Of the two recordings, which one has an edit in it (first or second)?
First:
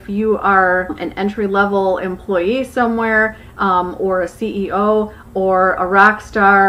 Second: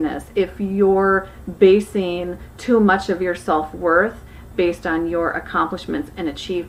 first